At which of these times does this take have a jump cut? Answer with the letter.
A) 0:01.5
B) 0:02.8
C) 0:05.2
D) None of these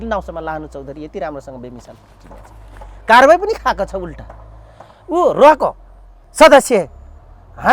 D